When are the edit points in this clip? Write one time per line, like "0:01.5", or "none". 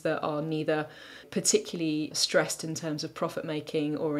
0:01.3
0:02.2